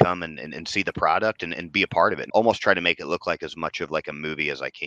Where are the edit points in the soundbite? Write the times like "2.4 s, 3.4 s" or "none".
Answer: 2.2 s